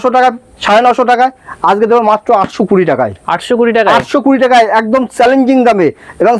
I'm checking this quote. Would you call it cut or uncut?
uncut